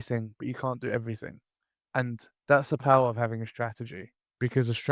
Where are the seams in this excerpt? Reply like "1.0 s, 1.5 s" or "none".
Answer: none